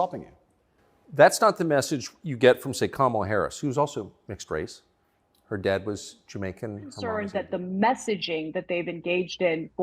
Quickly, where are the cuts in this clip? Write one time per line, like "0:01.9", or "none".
0:07.1